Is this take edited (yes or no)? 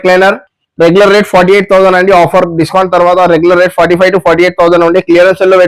no